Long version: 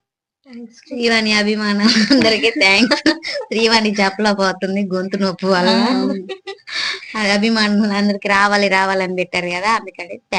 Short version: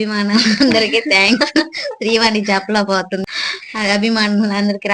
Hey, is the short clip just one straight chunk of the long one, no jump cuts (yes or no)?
no